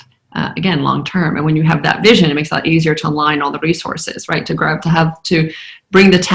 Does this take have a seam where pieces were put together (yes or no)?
no